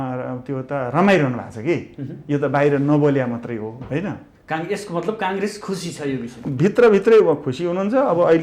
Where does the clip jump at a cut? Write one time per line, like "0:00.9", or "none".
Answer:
none